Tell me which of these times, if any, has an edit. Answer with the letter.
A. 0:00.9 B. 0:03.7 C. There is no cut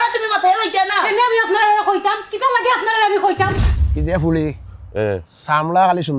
B